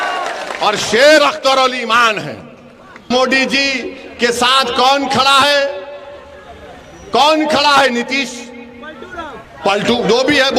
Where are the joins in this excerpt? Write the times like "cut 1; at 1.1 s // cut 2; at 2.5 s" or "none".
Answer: cut 1; at 3.1 s